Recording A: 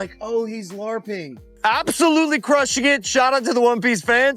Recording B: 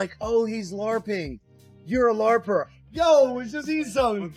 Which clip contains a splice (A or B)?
A